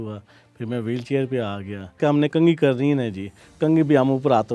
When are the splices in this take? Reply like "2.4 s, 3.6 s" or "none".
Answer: 2.0 s